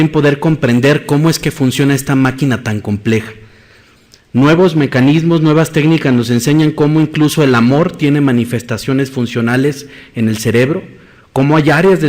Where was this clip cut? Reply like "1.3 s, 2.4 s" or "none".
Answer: 9.6 s